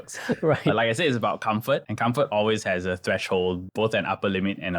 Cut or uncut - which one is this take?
cut